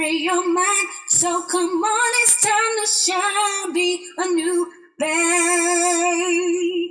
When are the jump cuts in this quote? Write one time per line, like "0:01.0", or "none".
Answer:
none